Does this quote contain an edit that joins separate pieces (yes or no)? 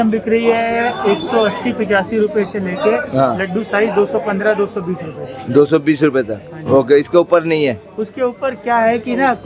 no